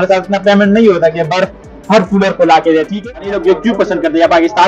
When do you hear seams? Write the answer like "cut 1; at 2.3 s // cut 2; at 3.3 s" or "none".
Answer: cut 1; at 3.1 s